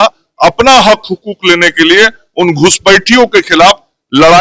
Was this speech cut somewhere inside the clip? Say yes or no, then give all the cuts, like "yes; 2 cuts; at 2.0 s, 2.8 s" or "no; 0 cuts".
no; 0 cuts